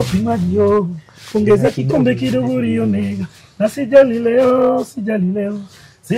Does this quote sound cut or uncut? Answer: uncut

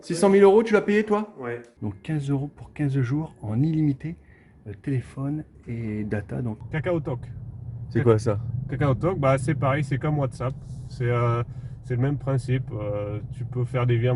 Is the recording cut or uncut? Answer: cut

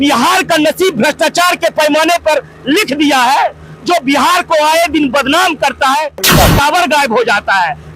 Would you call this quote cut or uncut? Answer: cut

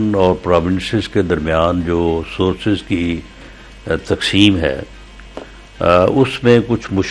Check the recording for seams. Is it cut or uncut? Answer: uncut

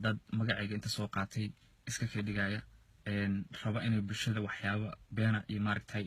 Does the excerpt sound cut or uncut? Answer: uncut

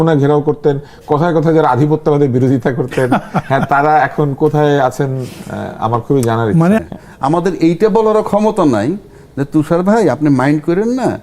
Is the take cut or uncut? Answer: cut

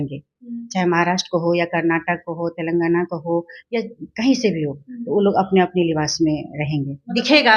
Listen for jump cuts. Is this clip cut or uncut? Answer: uncut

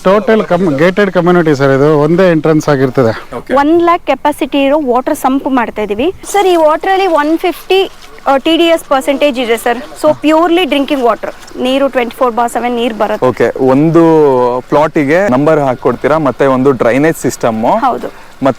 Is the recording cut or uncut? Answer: cut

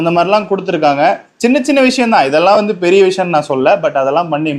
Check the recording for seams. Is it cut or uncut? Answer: uncut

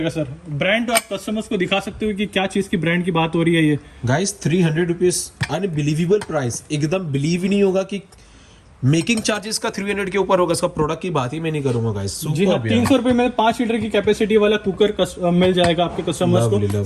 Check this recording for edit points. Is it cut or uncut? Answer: uncut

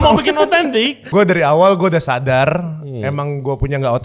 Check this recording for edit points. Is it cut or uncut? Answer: cut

